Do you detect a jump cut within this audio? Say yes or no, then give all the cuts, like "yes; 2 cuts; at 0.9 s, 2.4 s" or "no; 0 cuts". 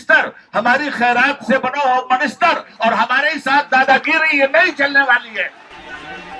no; 0 cuts